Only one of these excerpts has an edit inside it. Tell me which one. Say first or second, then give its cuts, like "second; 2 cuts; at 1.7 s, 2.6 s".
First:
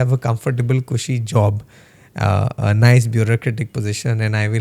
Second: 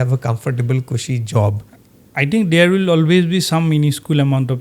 second; 1 cut; at 2.1 s